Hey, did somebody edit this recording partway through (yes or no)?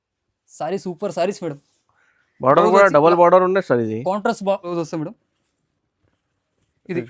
yes